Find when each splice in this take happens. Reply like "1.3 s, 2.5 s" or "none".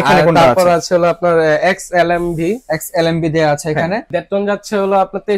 4.2 s